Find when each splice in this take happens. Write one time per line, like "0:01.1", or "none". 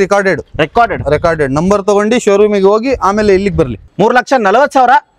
0:03.8